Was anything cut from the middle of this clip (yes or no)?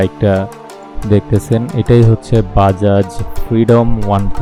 no